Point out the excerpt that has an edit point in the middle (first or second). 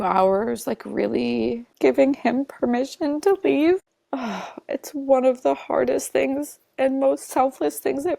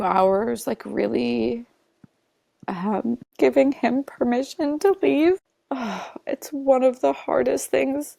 first